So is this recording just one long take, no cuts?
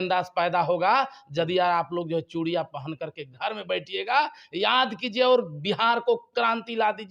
yes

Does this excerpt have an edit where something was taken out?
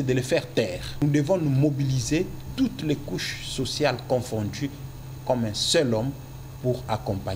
yes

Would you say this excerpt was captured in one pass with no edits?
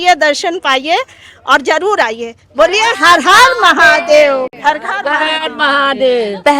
yes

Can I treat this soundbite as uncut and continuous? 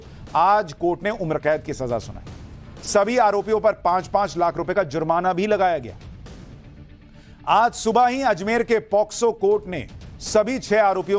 yes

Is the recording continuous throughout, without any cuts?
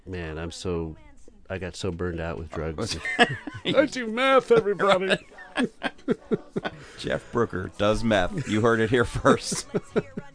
no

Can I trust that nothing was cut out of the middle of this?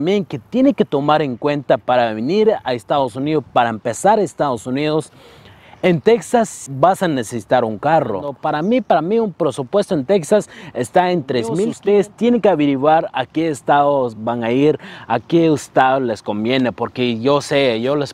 no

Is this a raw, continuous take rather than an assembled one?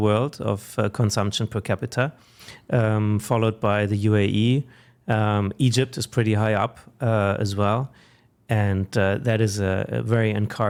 yes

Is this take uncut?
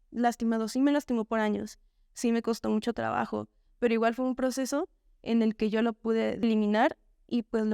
no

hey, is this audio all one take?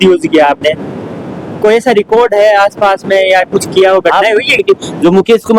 no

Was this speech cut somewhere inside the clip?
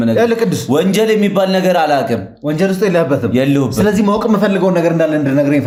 no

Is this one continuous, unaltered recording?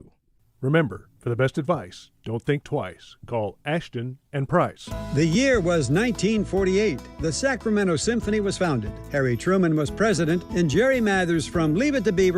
no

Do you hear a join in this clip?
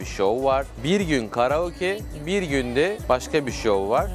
yes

